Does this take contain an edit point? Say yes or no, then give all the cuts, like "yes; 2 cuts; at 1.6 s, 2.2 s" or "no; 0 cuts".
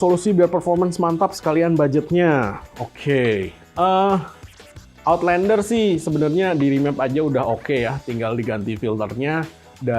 no; 0 cuts